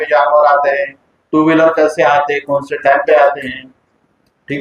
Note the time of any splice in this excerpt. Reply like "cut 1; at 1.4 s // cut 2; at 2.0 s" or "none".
none